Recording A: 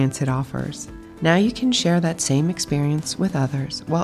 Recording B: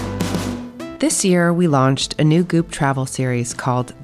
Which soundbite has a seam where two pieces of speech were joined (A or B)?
B